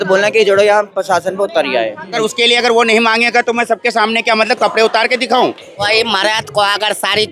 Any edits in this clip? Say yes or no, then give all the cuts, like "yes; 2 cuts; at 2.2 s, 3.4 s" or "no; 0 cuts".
yes; 2 cuts; at 2.2 s, 5.7 s